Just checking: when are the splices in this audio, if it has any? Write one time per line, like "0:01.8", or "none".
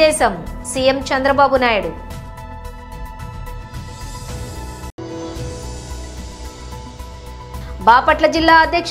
none